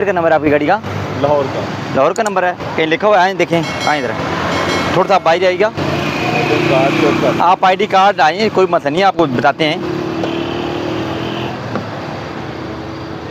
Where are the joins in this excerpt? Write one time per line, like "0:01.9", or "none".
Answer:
none